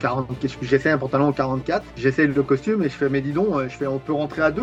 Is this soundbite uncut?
yes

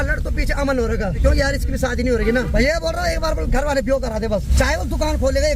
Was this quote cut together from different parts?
yes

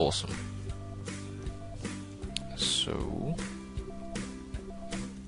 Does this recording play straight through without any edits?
yes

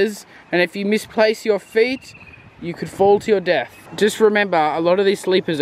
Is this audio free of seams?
no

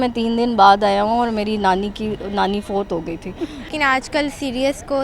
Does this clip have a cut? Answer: yes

